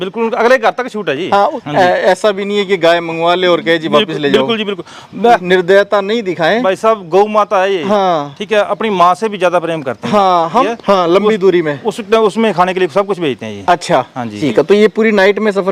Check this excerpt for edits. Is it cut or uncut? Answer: cut